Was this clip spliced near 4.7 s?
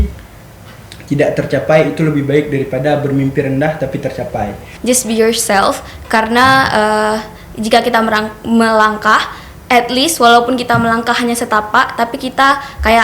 yes; 1 cut; at 4.7 s

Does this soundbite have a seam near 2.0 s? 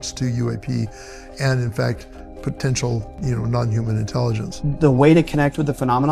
no; 2 cuts; at 3.2 s, 4.5 s

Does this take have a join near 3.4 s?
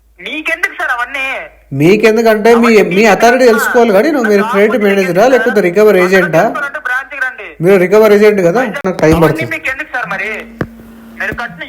no; 1 cut; at 8.8 s

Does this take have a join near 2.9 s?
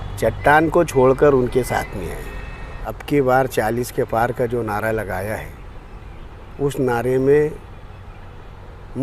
yes; 1 cut; at 2.9 s

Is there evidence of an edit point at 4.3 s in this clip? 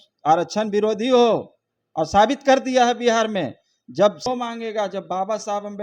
yes; 1 cut; at 4.3 s

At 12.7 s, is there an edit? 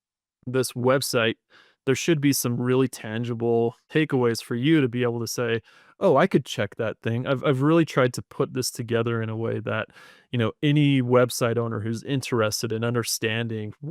no; 1 cut; at 3.8 s

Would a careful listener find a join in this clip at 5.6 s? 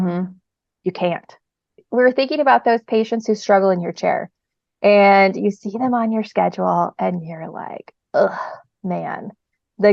no; 1 cut; at 1.8 s

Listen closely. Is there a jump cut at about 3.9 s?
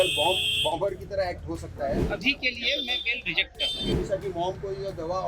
yes; 2 cuts; at 2.0 s, 3.9 s

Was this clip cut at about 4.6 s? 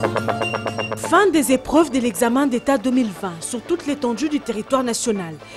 no; 1 cut; at 1.0 s

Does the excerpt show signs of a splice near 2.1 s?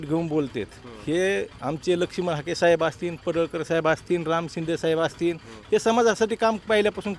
no; 0 cuts

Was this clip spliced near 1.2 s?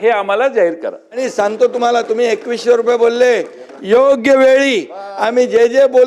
yes; 1 cut; at 1.2 s

